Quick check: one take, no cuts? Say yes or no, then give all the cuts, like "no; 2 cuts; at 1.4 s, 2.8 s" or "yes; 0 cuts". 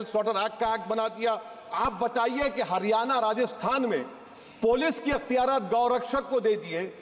no; 1 cut; at 1.6 s